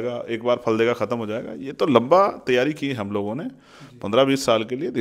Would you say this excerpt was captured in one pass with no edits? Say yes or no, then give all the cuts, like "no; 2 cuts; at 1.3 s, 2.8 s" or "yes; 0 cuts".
yes; 0 cuts